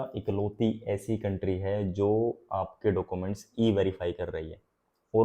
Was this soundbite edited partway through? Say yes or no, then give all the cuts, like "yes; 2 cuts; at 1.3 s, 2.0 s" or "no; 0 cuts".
no; 0 cuts